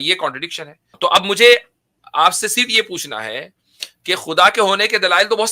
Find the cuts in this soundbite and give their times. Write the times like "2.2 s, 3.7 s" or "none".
0.9 s